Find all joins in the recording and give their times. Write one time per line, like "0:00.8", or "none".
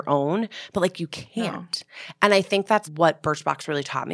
0:02.9